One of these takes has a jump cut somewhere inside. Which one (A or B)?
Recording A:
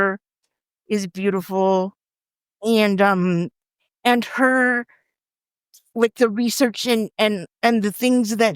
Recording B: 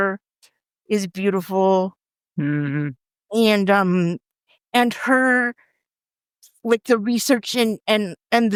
A